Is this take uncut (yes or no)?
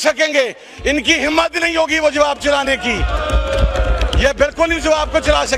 yes